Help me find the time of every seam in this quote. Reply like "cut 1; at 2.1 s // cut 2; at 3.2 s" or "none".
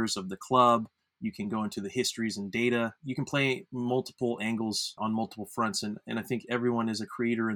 cut 1; at 3.0 s // cut 2; at 5.0 s